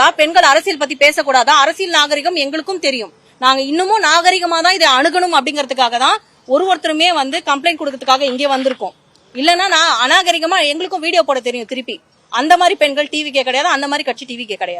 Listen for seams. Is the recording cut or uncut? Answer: uncut